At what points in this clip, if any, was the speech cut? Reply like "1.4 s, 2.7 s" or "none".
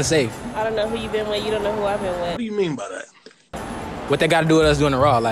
none